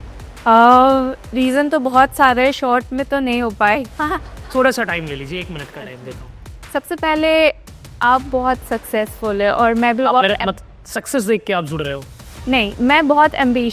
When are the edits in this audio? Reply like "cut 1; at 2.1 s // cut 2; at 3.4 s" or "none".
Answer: none